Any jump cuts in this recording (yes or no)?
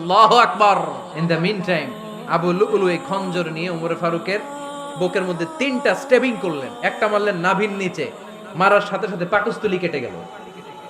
yes